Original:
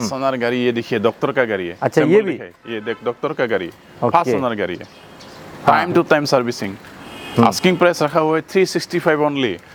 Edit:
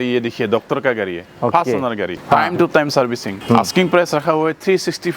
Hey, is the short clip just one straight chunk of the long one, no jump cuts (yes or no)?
no